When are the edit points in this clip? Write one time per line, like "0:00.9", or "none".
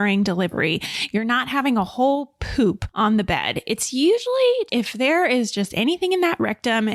0:02.9